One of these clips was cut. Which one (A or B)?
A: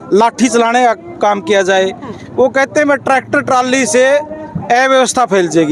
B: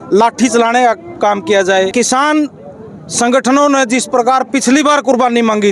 B